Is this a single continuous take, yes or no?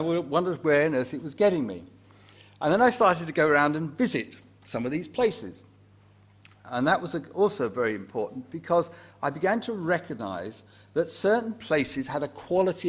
no